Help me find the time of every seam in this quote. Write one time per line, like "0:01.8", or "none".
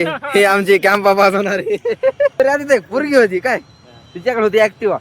0:02.4

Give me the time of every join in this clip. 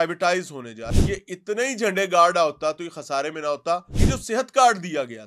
0:00.9
0:03.9

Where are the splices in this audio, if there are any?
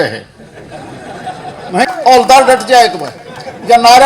0:01.9

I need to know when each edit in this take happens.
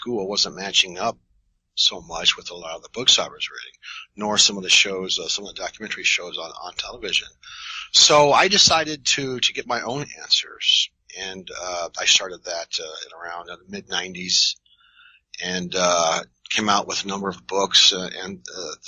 0:16.5

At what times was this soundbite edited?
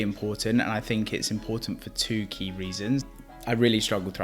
0:03.0

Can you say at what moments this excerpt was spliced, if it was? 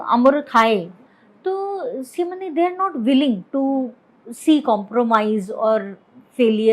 0:01.1

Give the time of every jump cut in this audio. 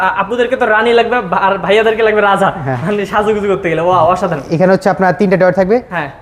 none

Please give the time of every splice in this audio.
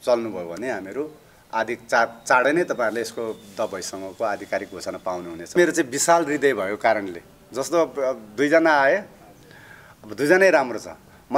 0:05.5

